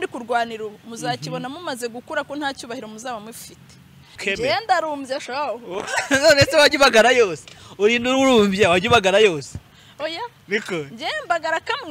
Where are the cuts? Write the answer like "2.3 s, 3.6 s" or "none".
4.2 s